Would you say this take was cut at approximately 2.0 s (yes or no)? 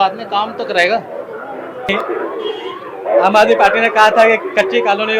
yes